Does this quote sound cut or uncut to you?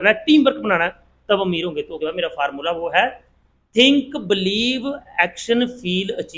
cut